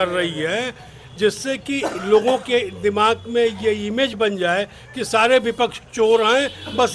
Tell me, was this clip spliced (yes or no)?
no